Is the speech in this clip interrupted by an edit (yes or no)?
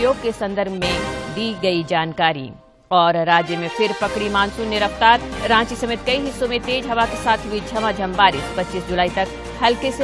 no